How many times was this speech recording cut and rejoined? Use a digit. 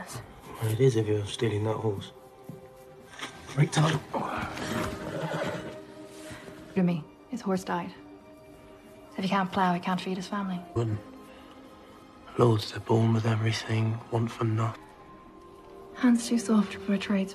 0